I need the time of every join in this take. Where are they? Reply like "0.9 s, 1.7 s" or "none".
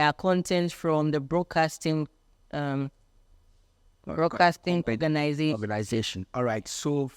none